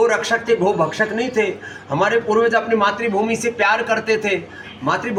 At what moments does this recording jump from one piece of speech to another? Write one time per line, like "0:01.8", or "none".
none